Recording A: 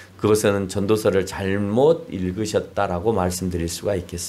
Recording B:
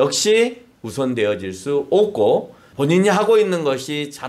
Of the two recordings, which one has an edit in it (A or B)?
B